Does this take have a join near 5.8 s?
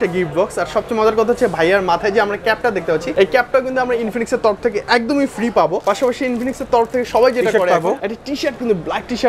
yes; 3 cuts; at 3.1 s, 5.8 s, 8.0 s

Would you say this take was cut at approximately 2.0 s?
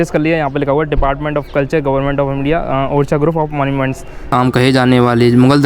no; 1 cut; at 4.3 s

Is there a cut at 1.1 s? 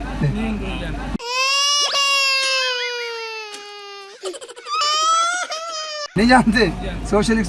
yes; 1 cut; at 1.1 s

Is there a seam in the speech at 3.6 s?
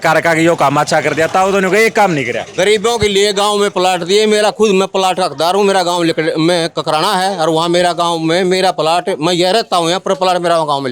no; 0 cuts

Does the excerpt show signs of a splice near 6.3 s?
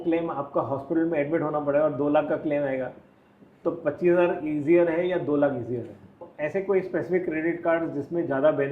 yes; 1 cut; at 6.3 s

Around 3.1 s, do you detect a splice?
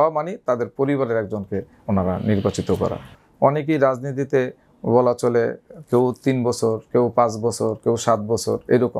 yes; 1 cut; at 3.1 s

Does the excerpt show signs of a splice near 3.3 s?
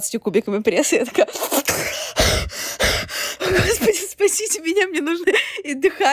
yes; 1 cut; at 3.3 s

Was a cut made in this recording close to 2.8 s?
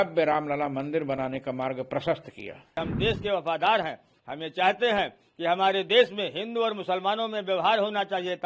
yes; 1 cut; at 2.8 s

